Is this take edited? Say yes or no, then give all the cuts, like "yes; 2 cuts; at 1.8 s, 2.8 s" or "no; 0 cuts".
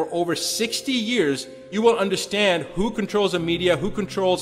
yes; 1 cut; at 1.7 s